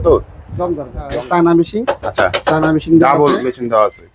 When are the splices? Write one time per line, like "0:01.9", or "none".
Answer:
0:01.0